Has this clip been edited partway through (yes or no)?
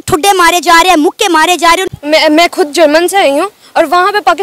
no